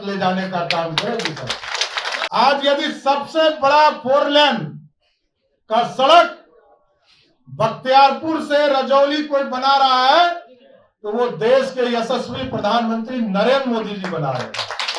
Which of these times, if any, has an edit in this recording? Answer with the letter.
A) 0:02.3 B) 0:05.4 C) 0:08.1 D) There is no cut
A